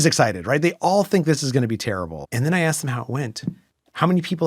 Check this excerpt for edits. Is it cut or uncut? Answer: cut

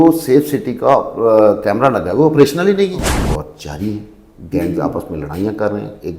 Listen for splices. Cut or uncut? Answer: cut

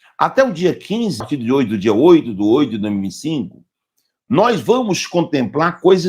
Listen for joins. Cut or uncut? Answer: cut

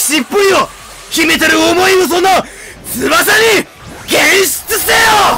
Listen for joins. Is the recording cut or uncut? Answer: uncut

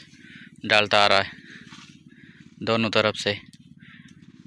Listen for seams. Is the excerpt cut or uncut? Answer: uncut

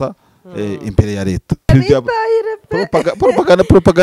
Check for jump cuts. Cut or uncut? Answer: cut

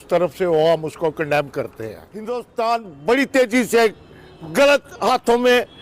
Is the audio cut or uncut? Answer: cut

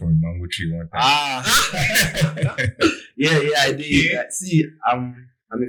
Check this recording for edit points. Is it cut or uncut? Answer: uncut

